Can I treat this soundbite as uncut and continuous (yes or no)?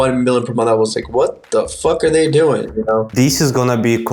no